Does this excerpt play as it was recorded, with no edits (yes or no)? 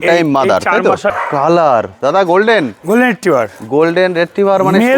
no